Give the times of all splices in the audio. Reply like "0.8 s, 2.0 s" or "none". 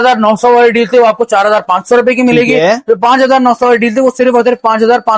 none